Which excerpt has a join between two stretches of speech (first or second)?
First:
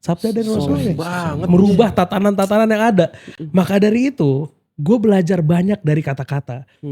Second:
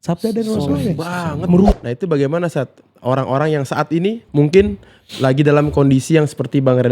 second